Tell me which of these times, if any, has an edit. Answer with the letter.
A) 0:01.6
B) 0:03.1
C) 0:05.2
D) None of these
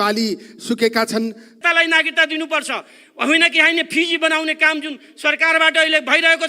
A